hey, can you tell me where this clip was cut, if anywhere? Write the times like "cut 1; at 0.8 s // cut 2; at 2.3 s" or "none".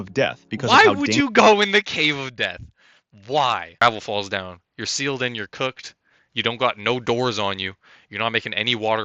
cut 1; at 3.8 s